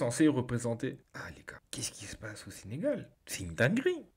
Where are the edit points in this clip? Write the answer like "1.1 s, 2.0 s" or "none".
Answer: none